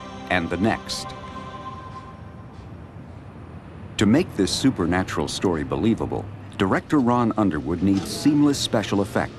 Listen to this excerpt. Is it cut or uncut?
cut